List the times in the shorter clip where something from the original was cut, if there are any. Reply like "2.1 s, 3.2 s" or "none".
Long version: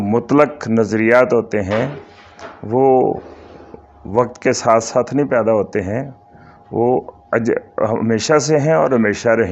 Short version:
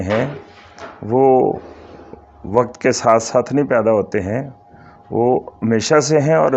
5.6 s